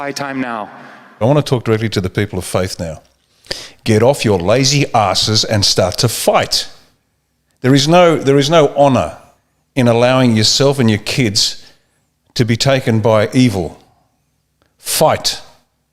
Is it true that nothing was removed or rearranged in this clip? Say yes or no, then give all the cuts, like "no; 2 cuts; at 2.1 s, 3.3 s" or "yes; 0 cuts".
no; 1 cut; at 1.2 s